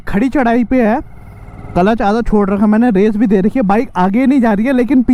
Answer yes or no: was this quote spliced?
no